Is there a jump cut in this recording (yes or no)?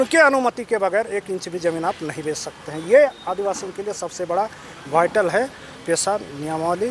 no